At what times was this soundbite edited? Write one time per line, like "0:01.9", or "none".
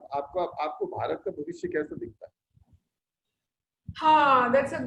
none